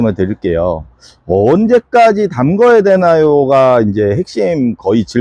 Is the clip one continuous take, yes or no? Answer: yes